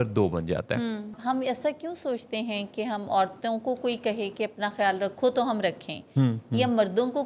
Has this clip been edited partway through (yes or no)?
yes